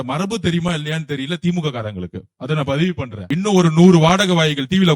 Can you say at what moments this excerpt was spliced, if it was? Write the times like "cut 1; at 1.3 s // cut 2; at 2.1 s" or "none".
cut 1; at 3.2 s